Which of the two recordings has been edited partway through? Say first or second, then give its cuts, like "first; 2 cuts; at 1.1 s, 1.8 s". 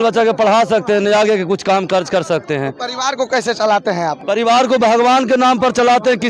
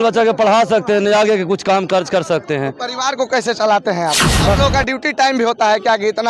second; 1 cut; at 4.2 s